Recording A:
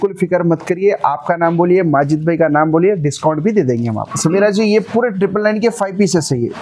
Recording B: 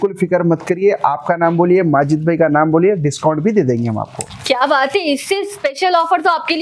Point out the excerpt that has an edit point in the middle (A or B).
A